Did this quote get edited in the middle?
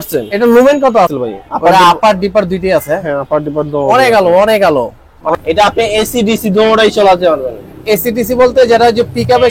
yes; 2 cuts; at 1.2 s, 5.3 s

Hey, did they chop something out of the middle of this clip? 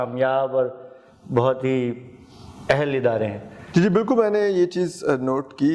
no; 0 cuts

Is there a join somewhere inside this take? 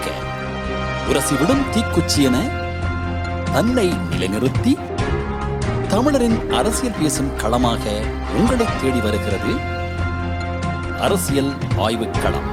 no; 0 cuts

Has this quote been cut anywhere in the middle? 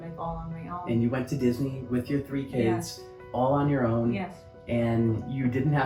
no; 0 cuts

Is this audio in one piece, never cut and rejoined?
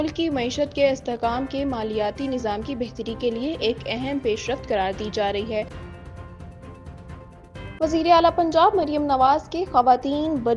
no; 2 cuts; at 5.7 s, 7.8 s

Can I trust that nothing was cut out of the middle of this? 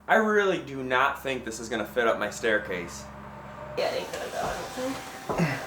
no; 1 cut; at 3.2 s

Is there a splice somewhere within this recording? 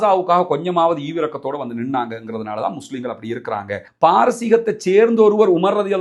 yes; 1 cut; at 3.8 s

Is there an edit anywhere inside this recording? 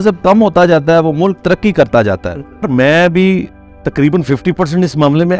yes; 1 cut; at 2.7 s

